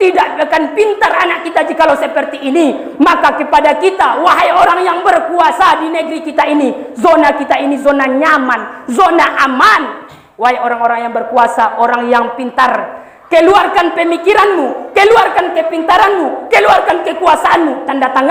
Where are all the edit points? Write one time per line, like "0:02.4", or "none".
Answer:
none